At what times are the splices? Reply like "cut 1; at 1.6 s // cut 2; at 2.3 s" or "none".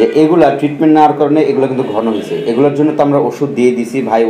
none